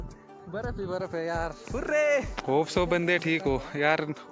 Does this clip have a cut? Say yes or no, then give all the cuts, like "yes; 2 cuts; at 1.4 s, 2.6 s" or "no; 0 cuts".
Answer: yes; 1 cut; at 2.3 s